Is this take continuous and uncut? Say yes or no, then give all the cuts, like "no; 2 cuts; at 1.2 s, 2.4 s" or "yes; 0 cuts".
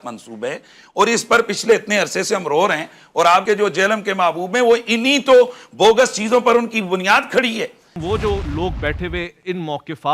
no; 1 cut; at 7.9 s